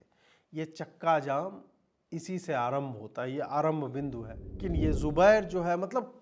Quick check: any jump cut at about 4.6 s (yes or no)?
yes